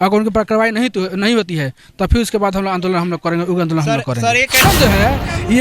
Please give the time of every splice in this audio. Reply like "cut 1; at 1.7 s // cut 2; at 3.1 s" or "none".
cut 1; at 4.6 s